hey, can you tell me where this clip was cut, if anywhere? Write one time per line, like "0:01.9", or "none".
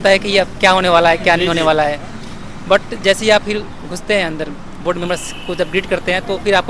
none

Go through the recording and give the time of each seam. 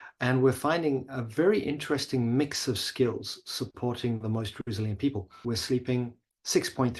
0:05.3

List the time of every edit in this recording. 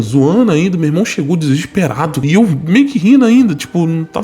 0:02.2

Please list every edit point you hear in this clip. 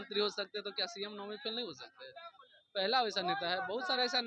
none

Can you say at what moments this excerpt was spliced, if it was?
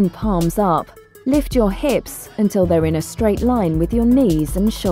none

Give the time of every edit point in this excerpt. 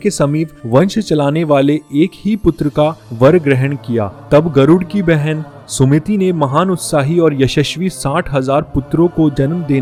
none

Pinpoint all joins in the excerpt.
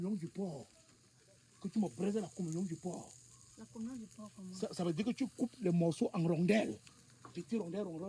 none

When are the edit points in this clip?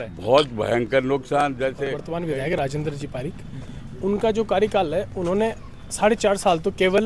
0:01.9

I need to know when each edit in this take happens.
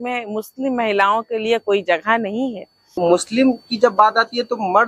0:02.8

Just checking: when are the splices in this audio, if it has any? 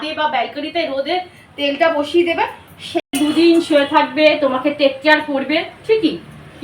0:03.0

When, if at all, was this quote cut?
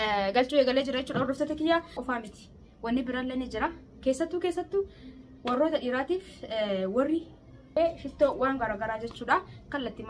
0:02.0
0:07.7

